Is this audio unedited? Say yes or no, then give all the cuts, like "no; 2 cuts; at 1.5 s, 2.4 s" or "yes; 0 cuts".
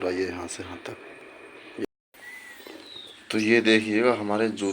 no; 1 cut; at 1.9 s